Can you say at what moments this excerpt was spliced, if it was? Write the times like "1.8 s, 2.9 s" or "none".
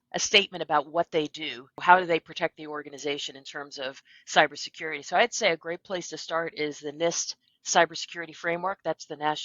1.7 s